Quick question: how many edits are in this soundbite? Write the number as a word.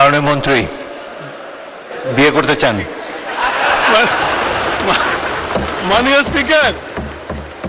zero